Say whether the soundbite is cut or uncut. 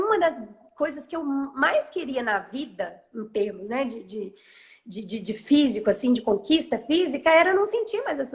uncut